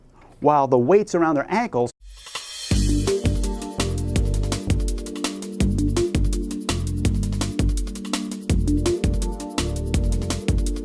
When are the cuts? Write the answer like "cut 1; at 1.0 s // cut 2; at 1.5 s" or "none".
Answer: none

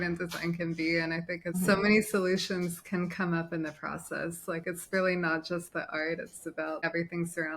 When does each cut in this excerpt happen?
cut 1; at 1.5 s // cut 2; at 6.8 s

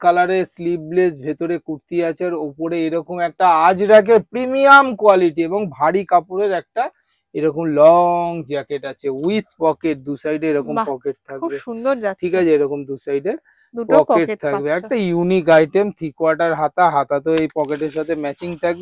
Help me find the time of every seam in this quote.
none

